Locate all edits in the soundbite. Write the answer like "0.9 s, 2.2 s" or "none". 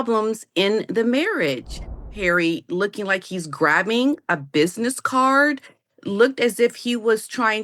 2.1 s